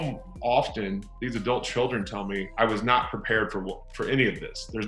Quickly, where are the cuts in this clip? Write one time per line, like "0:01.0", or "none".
0:02.5